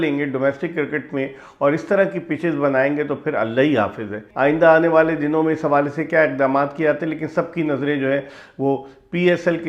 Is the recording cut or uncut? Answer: cut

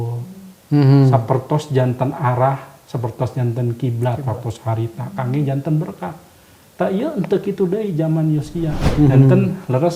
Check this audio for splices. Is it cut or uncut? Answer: cut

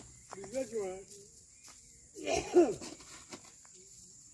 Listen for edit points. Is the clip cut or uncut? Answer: uncut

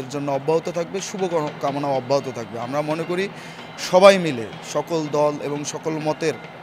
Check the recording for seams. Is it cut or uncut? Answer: uncut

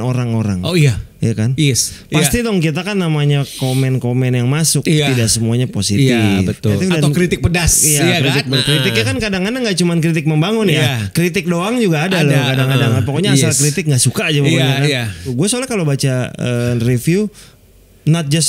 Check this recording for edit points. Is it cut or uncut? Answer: cut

